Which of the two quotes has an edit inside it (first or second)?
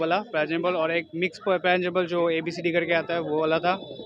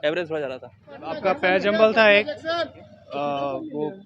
second